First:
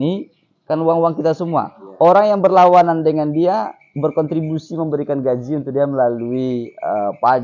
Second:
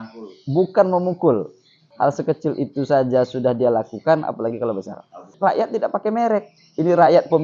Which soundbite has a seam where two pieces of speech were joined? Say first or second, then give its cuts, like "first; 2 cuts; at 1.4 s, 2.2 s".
second; 2 cuts; at 1.8 s, 5.3 s